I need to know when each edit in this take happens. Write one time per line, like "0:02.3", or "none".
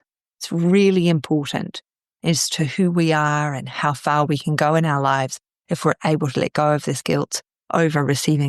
none